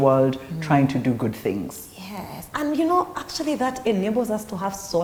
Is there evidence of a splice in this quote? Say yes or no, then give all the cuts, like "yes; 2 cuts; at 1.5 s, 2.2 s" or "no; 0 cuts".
no; 0 cuts